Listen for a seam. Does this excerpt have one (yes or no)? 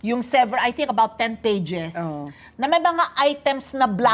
no